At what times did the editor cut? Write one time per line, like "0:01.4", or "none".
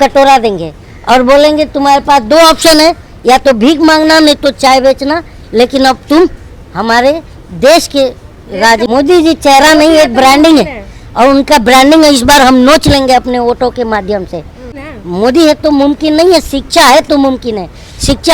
0:08.9
0:14.7